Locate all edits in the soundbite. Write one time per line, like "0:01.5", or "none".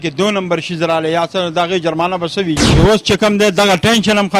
0:02.7

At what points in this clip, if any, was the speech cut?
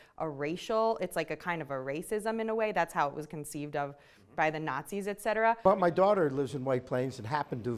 0:05.6

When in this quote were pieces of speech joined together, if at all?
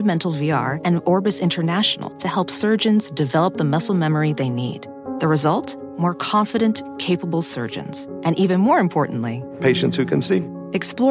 none

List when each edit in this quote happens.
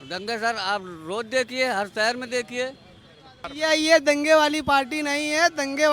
0:03.5

